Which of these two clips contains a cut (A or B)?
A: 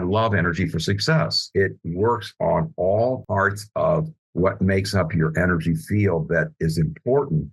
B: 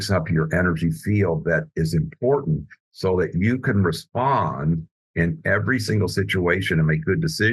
A